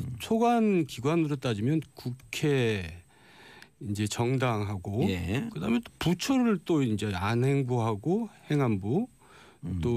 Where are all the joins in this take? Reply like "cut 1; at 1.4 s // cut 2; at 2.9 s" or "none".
cut 1; at 5.4 s